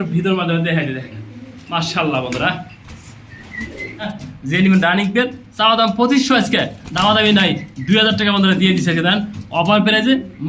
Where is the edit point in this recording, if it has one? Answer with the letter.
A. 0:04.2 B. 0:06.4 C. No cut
A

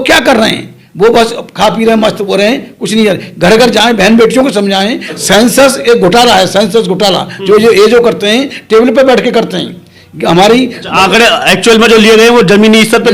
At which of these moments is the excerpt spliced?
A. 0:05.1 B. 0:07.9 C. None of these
A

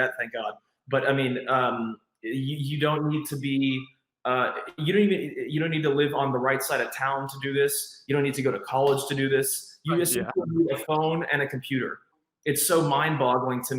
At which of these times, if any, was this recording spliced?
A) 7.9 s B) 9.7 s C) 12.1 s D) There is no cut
C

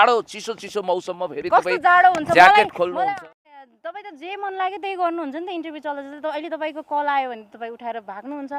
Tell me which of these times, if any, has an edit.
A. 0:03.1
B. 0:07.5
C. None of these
A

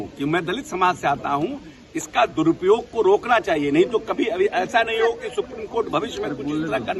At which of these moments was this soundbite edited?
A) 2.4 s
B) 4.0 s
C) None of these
C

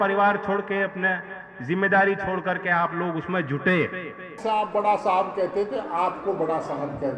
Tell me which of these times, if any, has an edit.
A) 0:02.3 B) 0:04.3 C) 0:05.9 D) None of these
B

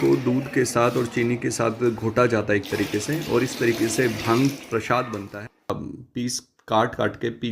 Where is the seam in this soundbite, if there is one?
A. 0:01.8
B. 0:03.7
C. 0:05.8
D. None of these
C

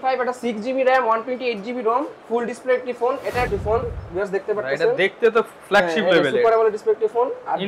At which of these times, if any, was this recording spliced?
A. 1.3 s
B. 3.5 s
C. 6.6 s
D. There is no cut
B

